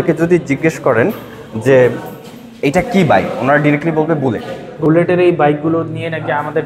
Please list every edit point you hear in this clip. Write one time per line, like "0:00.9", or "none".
0:04.8